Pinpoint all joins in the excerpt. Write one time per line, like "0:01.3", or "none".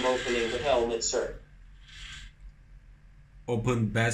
0:01.3